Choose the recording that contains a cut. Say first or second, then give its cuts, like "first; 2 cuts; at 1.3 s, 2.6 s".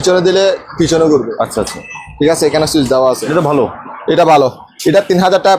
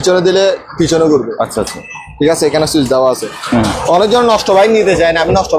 first; 1 cut; at 3.2 s